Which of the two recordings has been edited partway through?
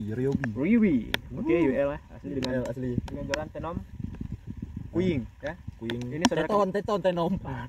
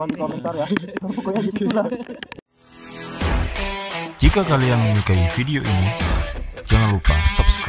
second; 1 cut; at 2.4 s

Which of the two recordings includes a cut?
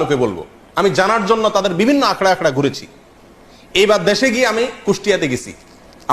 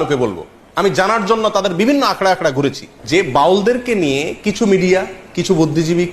second; 1 cut; at 2.9 s

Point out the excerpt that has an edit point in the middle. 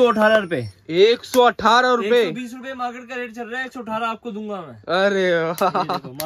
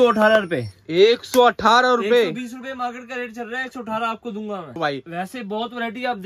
second; 1 cut; at 4.8 s

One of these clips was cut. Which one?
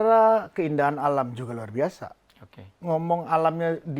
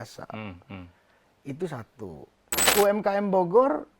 second; 1 cut; at 2.6 s

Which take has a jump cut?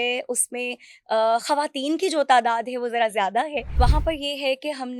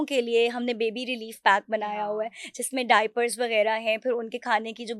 first; 1 cut; at 3.7 s

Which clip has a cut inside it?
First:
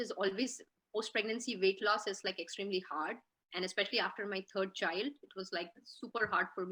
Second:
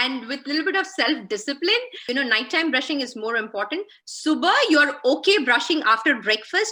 second; 1 cut; at 1.9 s

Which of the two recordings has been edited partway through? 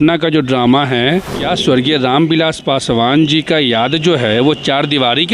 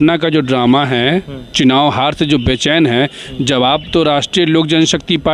first; 1 cut; at 1.4 s

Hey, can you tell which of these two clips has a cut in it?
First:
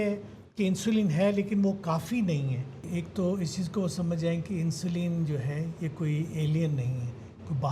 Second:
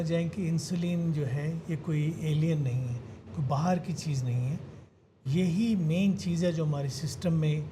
first; 1 cut; at 2.9 s

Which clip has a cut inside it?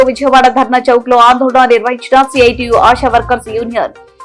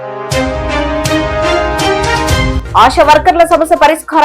second; 1 cut; at 2.6 s

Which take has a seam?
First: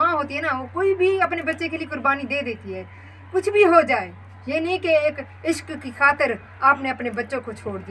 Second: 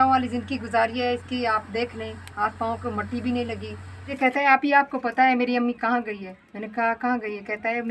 second; 1 cut; at 4.1 s

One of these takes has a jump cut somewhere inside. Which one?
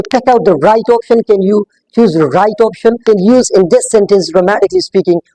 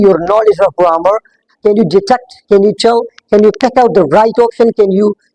first; 1 cut; at 3.0 s

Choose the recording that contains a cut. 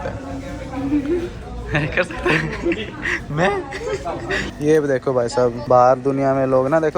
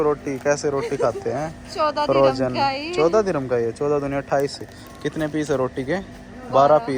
first; 2 cuts; at 4.5 s, 5.6 s

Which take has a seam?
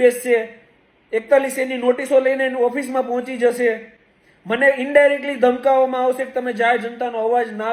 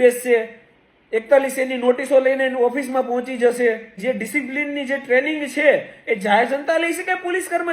second; 1 cut; at 3.9 s

